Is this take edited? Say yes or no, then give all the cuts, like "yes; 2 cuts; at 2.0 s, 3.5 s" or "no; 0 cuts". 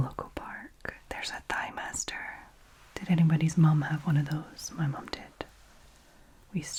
no; 0 cuts